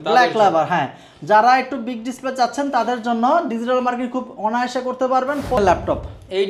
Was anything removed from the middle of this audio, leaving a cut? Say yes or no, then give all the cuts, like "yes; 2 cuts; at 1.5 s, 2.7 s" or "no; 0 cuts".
yes; 1 cut; at 5.6 s